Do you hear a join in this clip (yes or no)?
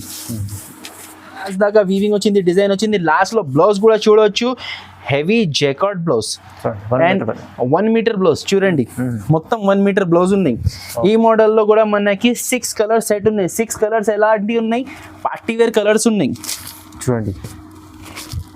yes